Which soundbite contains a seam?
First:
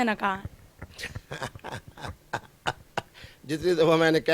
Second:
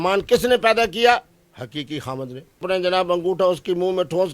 second; 1 cut; at 2.6 s

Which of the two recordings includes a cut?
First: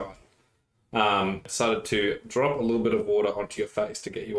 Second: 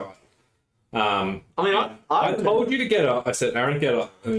first; 1 cut; at 1.4 s

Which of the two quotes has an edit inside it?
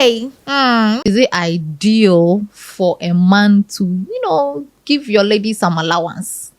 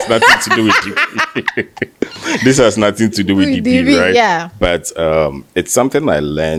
first; 1 cut; at 1.1 s

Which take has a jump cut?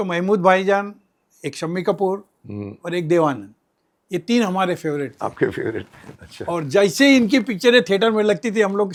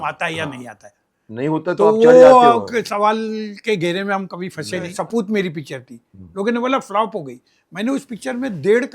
second; 1 cut; at 4.9 s

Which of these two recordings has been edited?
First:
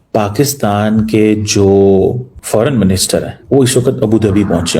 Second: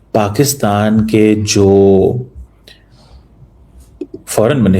first; 2 cuts; at 2.3 s, 3.4 s

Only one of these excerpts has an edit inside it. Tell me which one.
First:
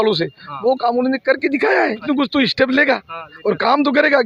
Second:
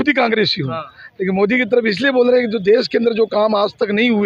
first; 1 cut; at 2.0 s

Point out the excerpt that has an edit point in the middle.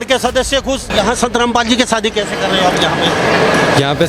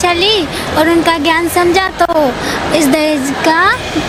first; 1 cut; at 0.9 s

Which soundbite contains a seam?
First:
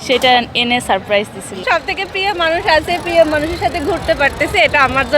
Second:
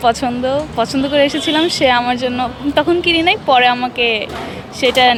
first; 1 cut; at 1.6 s

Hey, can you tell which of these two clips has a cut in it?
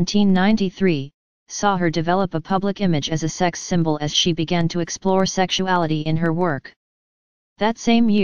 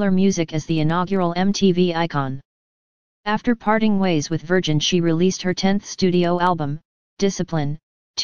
first; 1 cut; at 2.9 s

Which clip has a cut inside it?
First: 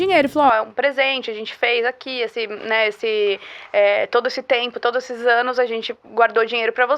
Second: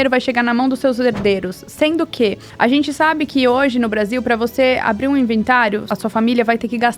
second; 2 cuts; at 2.4 s, 5.9 s

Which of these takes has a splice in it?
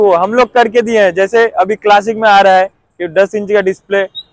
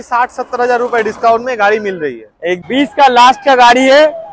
second; 1 cut; at 2.6 s

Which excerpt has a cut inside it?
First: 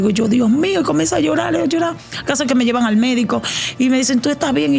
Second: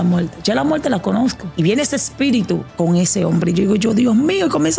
second; 2 cuts; at 1.4 s, 2.7 s

